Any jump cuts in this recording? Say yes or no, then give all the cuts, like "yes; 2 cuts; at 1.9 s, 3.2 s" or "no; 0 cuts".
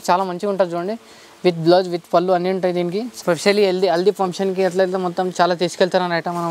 yes; 1 cut; at 3.1 s